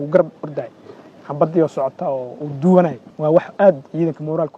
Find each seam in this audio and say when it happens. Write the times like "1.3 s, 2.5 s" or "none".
3.1 s